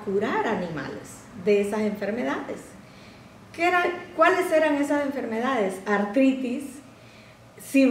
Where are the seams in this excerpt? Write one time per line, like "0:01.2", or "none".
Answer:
none